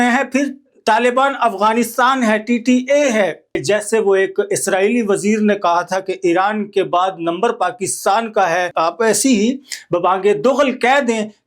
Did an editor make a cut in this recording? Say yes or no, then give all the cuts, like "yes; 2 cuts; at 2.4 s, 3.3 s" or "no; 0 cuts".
yes; 2 cuts; at 3.6 s, 8.7 s